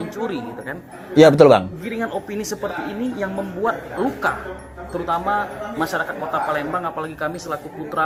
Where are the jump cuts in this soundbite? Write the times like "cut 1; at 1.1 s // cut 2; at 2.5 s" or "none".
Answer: none